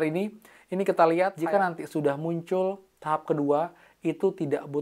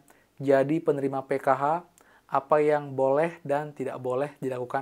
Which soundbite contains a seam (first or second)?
first